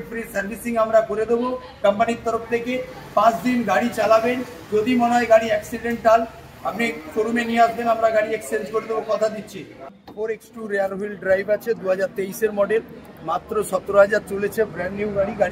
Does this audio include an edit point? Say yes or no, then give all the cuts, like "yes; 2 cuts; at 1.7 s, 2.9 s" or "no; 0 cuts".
yes; 1 cut; at 9.9 s